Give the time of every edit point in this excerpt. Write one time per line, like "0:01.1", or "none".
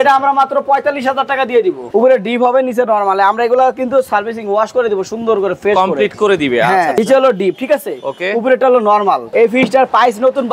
0:01.8
0:07.0
0:09.2